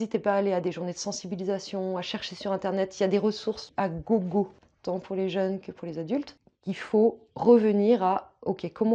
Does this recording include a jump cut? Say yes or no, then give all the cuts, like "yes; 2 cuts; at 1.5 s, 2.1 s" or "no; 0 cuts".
yes; 3 cuts; at 3.6 s, 4.7 s, 6.4 s